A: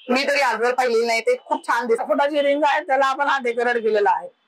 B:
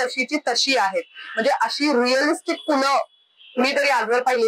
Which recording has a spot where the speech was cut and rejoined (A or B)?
A